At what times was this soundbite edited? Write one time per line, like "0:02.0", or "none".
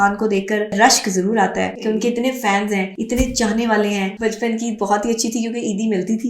0:00.7
0:01.8
0:03.0
0:04.1